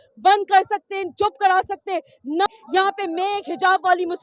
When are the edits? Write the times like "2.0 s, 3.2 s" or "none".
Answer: 2.5 s